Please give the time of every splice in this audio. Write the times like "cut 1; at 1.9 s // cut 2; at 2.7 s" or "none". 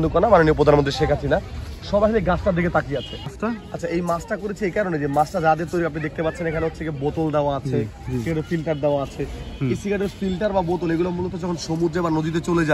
cut 1; at 3.3 s